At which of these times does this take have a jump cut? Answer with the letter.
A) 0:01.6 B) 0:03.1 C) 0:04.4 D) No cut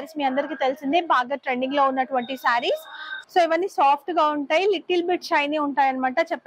B